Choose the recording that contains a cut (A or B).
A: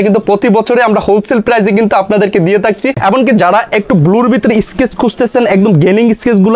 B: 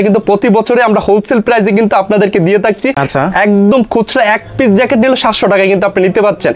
A